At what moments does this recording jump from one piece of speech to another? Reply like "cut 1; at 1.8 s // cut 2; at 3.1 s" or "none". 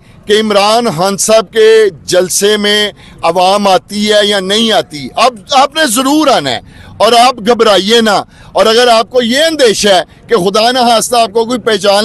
none